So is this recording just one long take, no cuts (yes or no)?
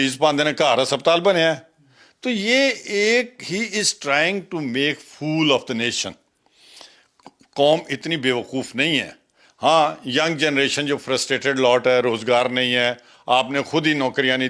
yes